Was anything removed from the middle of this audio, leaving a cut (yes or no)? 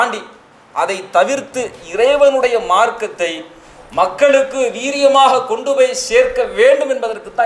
no